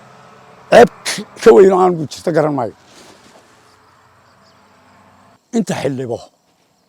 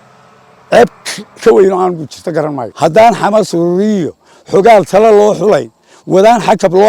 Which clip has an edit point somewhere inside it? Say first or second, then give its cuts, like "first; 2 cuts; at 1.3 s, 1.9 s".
second; 1 cut; at 2.6 s